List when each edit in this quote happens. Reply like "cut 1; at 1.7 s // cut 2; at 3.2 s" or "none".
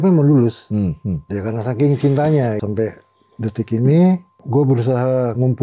cut 1; at 2.6 s // cut 2; at 4.3 s